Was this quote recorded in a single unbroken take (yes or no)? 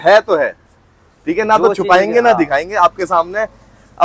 yes